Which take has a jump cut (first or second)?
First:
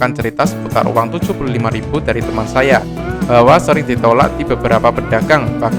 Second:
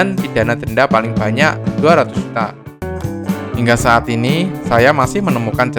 second